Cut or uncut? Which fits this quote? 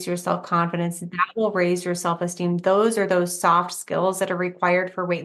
uncut